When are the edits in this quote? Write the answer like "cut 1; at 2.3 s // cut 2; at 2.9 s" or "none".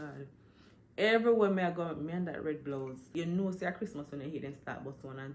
cut 1; at 3.1 s